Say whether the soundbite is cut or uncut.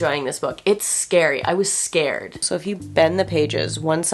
cut